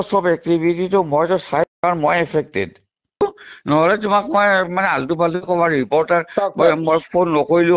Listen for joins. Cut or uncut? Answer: cut